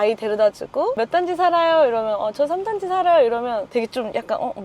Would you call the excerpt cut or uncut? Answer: cut